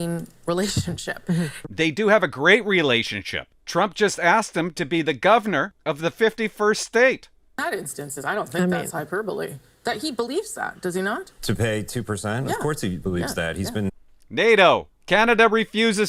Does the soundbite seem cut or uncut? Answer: uncut